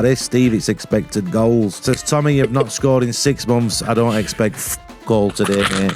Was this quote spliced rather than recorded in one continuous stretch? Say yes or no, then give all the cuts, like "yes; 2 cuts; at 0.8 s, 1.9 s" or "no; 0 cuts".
yes; 1 cut; at 1.8 s